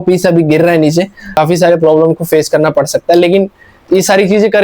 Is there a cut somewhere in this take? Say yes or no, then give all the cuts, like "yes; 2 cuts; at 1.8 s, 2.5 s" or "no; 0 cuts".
yes; 1 cut; at 1.3 s